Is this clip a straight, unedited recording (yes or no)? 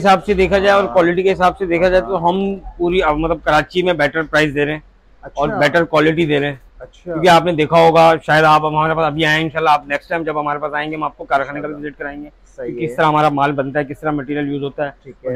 yes